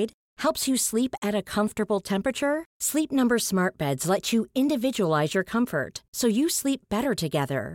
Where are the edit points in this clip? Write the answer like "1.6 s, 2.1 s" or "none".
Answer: none